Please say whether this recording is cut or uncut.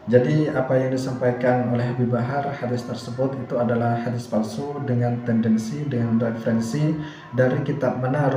uncut